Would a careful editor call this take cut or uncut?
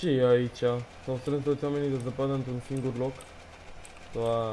uncut